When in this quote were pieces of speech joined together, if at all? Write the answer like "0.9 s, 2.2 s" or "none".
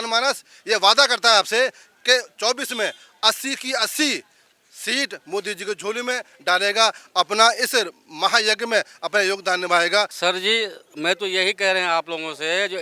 10.1 s